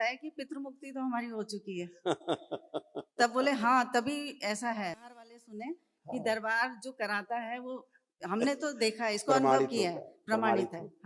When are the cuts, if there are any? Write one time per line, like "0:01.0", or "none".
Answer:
0:05.1